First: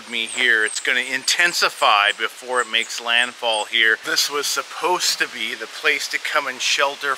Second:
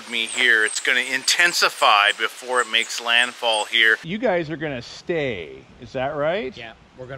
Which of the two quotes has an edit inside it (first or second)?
first